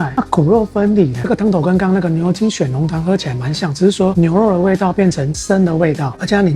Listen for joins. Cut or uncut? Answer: cut